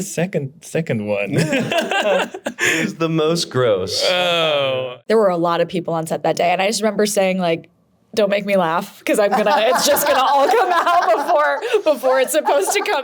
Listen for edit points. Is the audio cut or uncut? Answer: cut